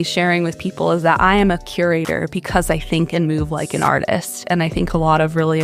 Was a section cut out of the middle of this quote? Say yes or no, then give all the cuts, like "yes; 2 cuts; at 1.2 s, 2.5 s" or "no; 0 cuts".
no; 0 cuts